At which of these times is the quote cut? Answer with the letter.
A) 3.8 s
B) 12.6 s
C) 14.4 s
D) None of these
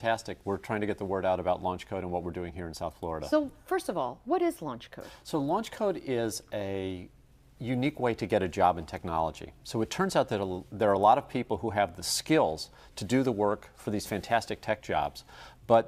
C